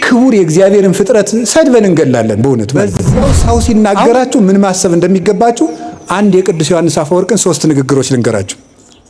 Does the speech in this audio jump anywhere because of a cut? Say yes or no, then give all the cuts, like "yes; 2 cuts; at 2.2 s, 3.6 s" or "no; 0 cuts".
yes; 1 cut; at 3.3 s